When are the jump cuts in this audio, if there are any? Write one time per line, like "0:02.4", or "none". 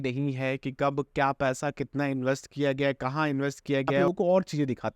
0:04.0